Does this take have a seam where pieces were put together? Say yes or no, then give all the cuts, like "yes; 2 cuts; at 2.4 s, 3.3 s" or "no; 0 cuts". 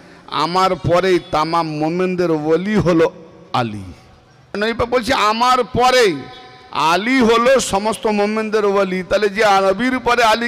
yes; 1 cut; at 4.6 s